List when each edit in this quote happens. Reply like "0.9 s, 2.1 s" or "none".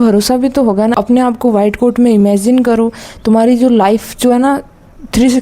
0.9 s